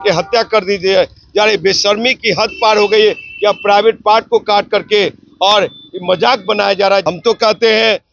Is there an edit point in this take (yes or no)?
yes